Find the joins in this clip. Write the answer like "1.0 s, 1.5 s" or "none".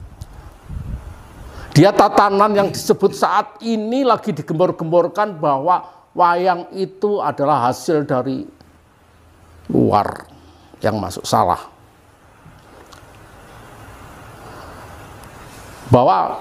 none